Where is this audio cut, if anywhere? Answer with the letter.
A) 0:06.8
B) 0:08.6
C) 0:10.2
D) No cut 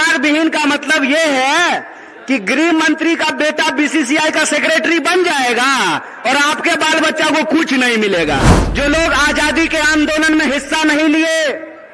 B